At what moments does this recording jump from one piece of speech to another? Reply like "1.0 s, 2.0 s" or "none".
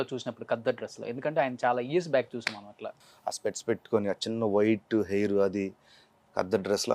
2.9 s